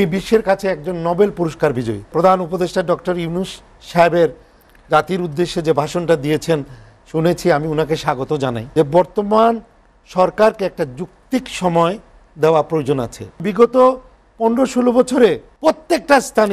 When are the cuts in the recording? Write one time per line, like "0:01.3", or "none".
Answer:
0:02.1
0:08.6
0:13.5
0:15.5